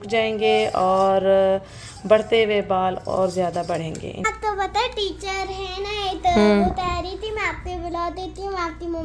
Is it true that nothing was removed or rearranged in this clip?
no; 1 cut; at 4.2 s

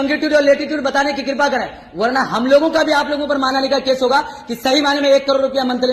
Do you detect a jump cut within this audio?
no; 0 cuts

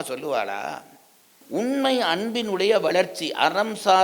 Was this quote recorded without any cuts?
no; 1 cut; at 1.3 s

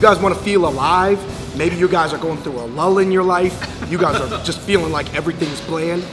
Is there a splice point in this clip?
no; 0 cuts

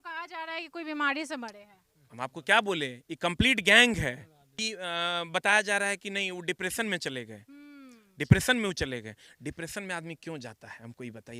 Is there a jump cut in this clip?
yes; 1 cut; at 4.6 s

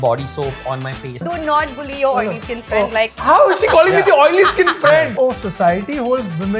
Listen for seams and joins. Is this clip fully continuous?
no; 3 cuts; at 1.2 s, 3.2 s, 5.1 s

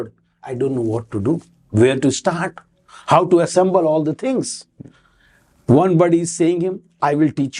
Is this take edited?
no; 0 cuts

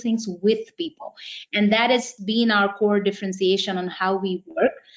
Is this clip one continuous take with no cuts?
no; 1 cut; at 2.1 s

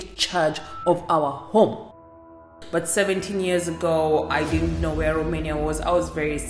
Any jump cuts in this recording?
yes; 1 cut; at 2.5 s

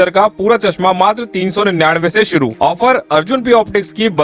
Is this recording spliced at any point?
no; 0 cuts

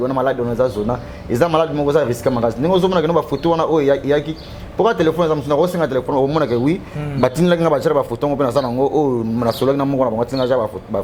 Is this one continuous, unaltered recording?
yes; 0 cuts

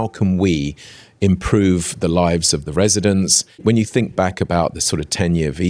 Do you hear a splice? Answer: yes; 1 cut; at 3.6 s

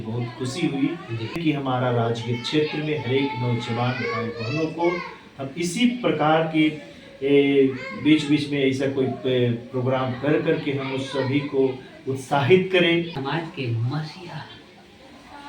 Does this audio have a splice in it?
yes; 2 cuts; at 1.4 s, 13.2 s

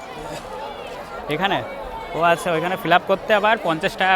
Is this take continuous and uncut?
yes; 0 cuts

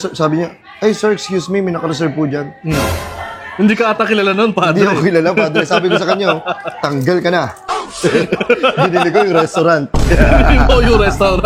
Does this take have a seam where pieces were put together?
no; 0 cuts

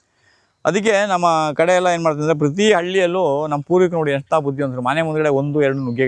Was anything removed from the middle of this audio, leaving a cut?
no; 0 cuts

